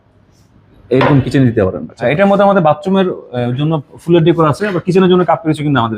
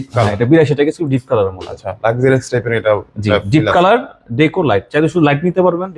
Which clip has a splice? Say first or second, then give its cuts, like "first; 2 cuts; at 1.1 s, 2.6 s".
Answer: first; 1 cut; at 2.0 s